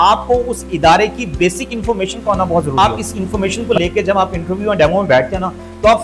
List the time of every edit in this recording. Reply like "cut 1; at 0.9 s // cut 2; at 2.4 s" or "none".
cut 1; at 2.7 s